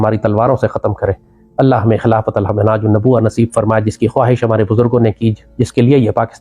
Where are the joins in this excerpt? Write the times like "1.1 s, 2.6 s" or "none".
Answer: none